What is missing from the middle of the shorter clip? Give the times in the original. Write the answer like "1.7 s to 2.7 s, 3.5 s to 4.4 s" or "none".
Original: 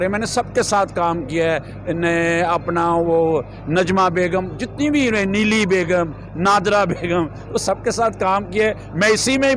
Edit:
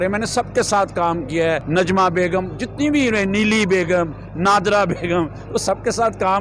1.6 s to 3.6 s